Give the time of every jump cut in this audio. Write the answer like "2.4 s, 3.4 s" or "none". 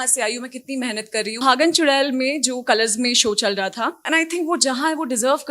1.4 s, 4.0 s